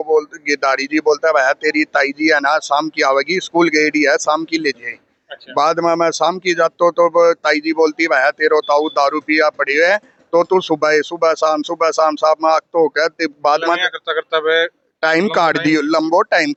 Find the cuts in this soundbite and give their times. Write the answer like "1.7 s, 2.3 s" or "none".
none